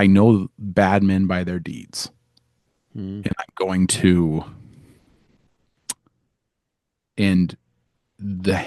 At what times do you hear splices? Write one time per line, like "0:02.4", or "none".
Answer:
none